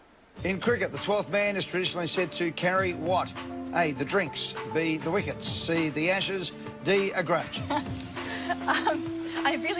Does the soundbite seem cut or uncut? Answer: uncut